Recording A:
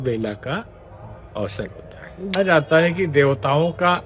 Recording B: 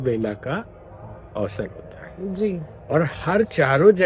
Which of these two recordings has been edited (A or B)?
A